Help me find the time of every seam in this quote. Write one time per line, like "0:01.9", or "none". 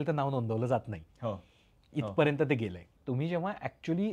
0:02.8